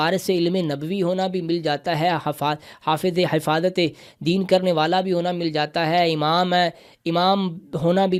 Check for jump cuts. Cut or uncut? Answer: uncut